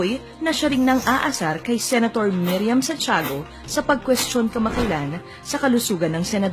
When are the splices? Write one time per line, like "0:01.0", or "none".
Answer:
0:04.3